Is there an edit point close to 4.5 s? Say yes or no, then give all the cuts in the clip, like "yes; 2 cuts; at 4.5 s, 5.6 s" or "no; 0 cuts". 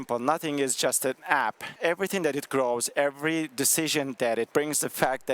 yes; 2 cuts; at 1.8 s, 4.5 s